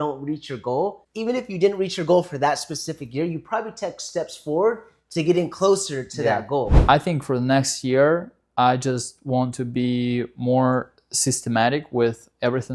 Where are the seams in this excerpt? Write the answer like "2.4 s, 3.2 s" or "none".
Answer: 1.1 s, 6.8 s